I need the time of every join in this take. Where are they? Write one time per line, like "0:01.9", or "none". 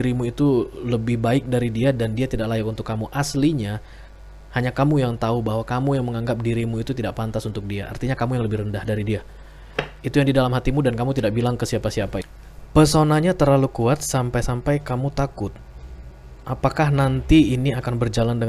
0:12.4